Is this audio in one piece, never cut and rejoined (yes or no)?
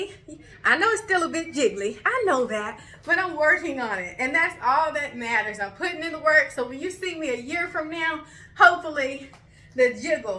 yes